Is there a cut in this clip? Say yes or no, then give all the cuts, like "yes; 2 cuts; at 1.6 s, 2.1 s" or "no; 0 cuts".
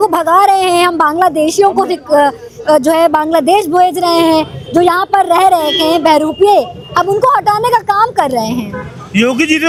no; 0 cuts